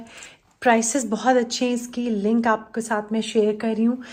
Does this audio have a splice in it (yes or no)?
no